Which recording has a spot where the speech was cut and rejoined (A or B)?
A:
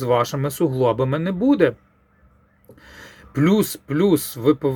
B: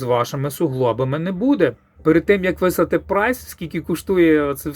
B